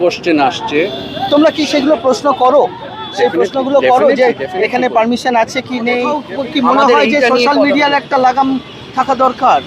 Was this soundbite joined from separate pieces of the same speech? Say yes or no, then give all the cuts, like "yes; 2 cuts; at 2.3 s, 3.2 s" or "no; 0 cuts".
yes; 1 cut; at 6.2 s